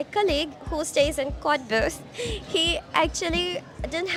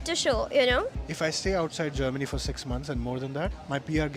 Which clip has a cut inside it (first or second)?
second